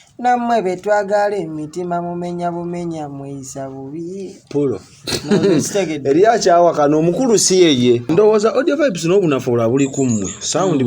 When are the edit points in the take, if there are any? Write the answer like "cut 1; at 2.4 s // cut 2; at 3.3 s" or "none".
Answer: cut 1; at 8.1 s